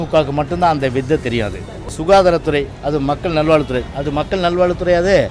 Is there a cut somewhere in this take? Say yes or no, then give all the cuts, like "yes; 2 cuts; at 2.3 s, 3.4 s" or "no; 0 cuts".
yes; 1 cut; at 1.9 s